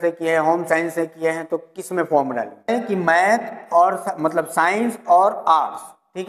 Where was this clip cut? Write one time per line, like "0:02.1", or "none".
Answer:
0:02.7